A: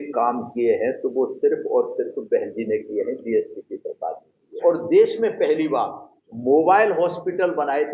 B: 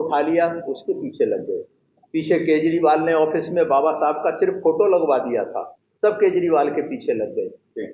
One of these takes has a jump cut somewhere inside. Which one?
A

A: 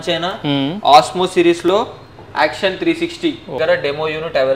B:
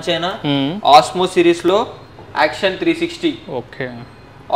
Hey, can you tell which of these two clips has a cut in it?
A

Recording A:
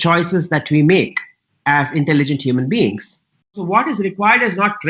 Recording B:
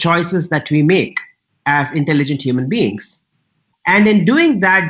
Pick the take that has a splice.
A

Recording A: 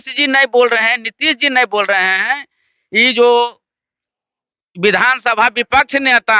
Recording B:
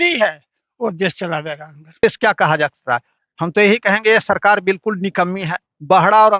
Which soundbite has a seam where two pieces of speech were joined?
B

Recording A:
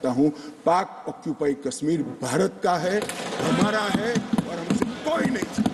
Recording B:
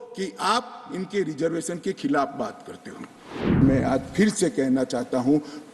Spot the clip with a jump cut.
B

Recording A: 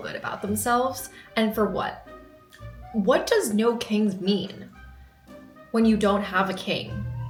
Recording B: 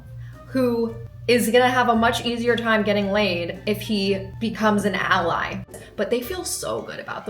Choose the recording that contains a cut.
B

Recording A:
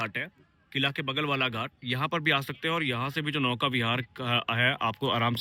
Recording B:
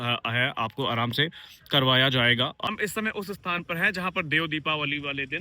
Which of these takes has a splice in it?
B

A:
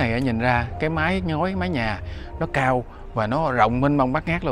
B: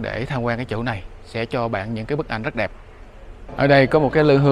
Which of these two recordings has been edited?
B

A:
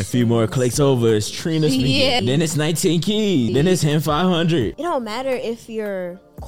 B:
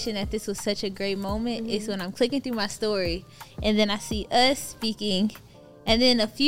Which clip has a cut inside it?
A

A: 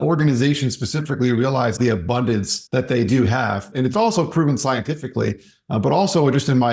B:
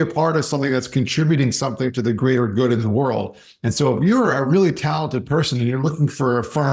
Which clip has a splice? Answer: A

